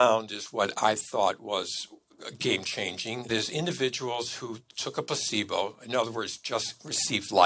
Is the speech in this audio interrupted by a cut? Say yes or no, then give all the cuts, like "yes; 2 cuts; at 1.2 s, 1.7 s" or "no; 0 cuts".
yes; 2 cuts; at 3.3 s, 4.8 s